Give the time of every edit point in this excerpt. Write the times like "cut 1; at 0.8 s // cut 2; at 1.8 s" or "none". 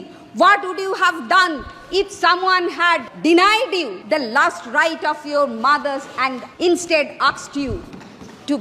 cut 1; at 3.1 s // cut 2; at 4.0 s // cut 3; at 6.4 s